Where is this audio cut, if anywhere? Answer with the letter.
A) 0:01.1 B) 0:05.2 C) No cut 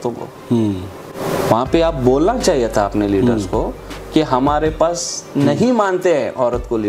A